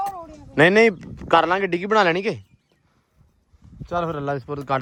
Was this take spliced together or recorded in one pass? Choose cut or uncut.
uncut